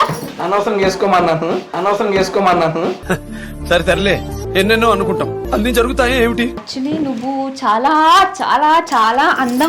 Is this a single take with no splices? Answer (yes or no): no